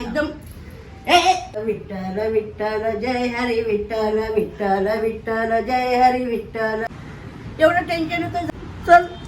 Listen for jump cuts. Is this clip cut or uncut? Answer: cut